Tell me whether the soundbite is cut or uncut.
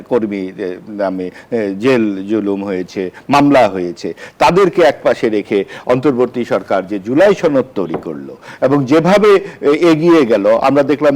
uncut